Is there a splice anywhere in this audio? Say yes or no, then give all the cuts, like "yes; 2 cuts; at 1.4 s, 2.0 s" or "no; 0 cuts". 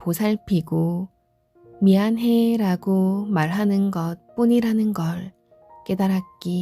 no; 0 cuts